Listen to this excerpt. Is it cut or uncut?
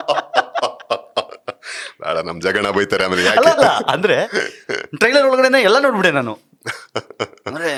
uncut